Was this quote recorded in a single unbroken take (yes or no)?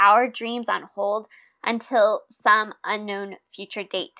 yes